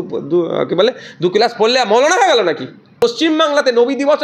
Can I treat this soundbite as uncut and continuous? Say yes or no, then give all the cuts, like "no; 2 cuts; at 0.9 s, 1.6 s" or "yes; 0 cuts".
no; 1 cut; at 2.9 s